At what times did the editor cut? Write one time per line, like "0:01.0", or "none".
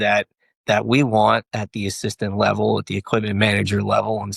none